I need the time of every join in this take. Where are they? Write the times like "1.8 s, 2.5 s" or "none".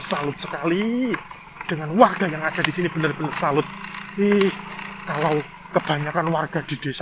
none